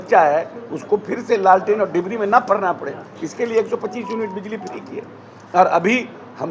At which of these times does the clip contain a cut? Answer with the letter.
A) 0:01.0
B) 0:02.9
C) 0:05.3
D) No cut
D